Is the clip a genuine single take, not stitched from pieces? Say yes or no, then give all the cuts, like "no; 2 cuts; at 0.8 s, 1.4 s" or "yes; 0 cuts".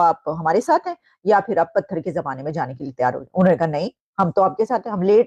yes; 0 cuts